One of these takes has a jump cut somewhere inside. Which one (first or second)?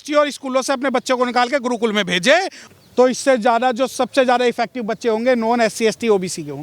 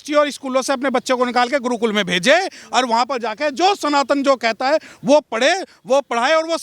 first